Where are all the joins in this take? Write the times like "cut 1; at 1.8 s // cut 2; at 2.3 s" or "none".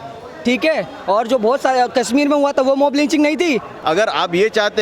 cut 1; at 3.7 s

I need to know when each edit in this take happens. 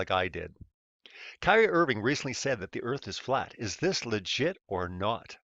cut 1; at 1.3 s

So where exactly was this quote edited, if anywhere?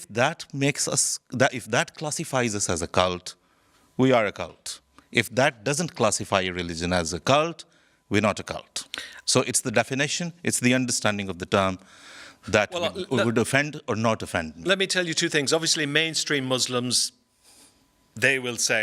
none

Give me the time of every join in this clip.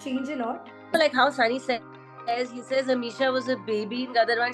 cut 1; at 0.9 s

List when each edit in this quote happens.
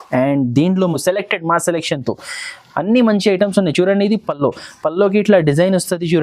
cut 1; at 0.9 s

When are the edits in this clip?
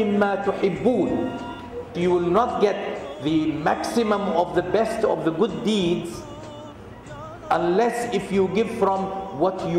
cut 1; at 1.9 s

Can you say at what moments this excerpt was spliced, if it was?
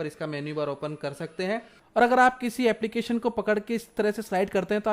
cut 1; at 1.7 s

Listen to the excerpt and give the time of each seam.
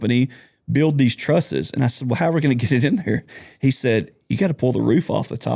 none

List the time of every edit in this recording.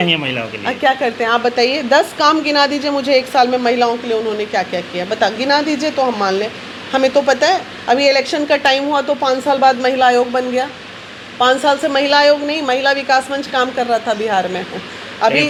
none

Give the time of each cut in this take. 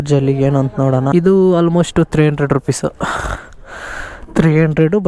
cut 1; at 1.1 s

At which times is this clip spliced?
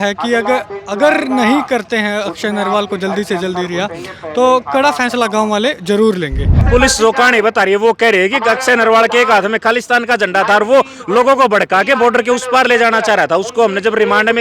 cut 1; at 6.6 s

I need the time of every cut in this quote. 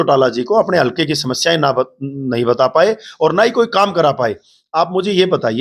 none

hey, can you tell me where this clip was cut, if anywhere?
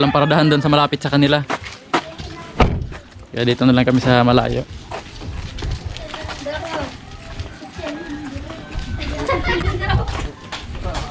none

